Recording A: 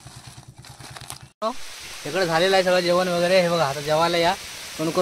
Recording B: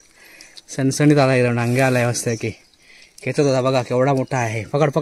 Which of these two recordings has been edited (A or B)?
A